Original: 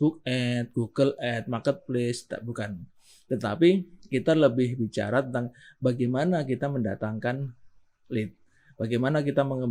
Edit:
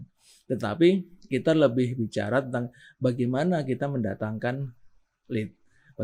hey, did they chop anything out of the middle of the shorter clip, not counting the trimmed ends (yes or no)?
no